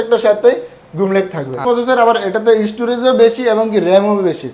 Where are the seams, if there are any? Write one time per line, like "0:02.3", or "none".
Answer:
0:01.6